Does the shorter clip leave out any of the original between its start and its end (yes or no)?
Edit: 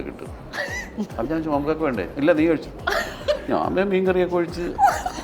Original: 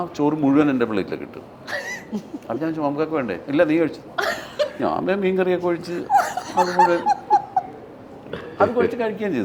yes